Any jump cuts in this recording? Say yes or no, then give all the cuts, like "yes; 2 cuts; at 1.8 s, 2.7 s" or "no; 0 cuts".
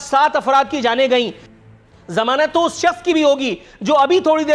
yes; 1 cut; at 1.4 s